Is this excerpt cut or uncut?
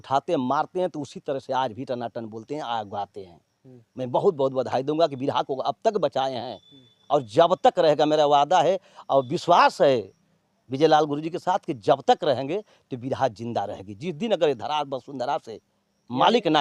uncut